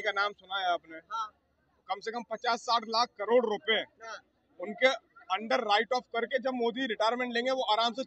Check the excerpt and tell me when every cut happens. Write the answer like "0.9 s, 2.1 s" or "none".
none